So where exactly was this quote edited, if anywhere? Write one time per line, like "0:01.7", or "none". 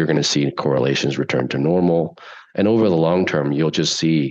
none